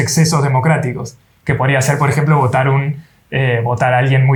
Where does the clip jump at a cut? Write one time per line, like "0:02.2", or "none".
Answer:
none